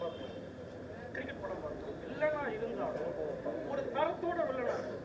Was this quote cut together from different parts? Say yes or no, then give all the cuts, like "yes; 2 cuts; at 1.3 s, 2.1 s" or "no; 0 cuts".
no; 0 cuts